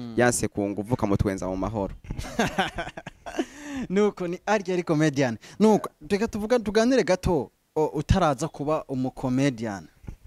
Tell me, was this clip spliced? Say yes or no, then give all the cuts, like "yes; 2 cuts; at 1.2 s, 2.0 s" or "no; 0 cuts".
no; 0 cuts